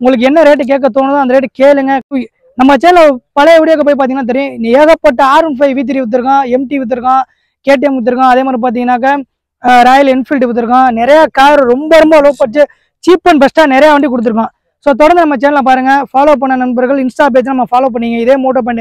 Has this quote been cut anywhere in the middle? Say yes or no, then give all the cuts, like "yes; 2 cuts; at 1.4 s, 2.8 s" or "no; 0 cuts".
yes; 1 cut; at 2.1 s